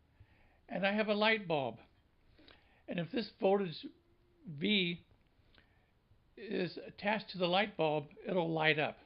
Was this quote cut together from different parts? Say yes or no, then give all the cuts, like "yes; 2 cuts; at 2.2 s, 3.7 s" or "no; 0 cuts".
yes; 1 cut; at 6.9 s